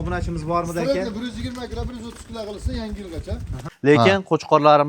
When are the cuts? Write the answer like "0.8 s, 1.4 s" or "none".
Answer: 3.5 s